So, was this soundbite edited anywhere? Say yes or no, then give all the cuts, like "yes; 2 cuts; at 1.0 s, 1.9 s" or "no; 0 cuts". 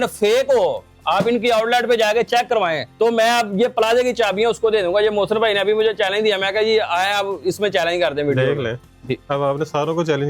yes; 1 cut; at 2.8 s